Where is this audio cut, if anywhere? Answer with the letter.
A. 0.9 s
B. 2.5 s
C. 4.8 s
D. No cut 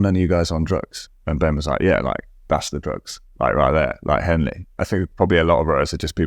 C